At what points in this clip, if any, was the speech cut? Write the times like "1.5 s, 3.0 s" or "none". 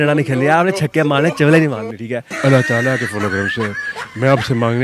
2.3 s